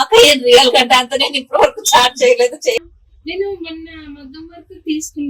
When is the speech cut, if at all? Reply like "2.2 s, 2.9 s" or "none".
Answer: 2.8 s